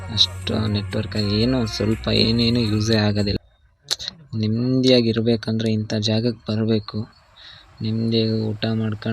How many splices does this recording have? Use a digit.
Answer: 1